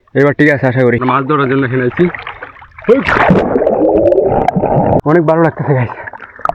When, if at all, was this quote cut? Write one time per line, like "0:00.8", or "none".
0:01.0
0:05.0